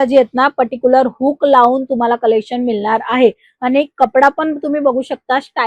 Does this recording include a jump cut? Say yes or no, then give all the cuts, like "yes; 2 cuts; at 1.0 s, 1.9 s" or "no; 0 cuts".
no; 0 cuts